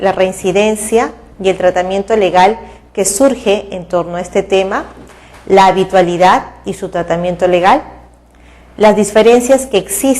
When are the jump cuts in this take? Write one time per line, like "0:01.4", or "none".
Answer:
0:01.2